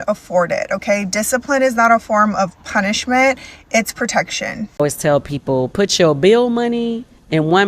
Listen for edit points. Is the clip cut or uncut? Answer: cut